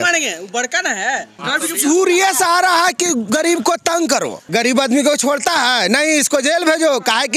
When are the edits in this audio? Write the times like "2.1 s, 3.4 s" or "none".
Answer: 1.3 s, 4.4 s